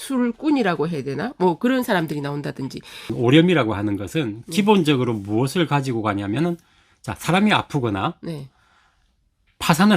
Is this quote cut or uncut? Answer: cut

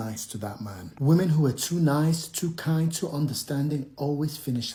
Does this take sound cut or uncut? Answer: uncut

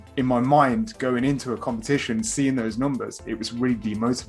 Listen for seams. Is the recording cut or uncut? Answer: uncut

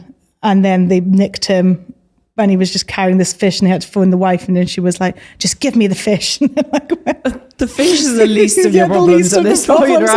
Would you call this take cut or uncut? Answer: uncut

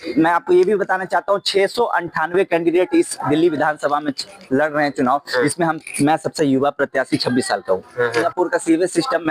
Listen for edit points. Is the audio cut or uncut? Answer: cut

